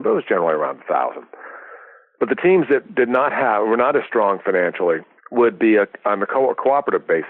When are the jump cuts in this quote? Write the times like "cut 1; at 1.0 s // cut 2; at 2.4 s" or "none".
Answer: cut 1; at 5.2 s